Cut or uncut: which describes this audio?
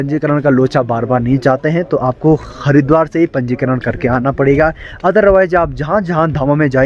uncut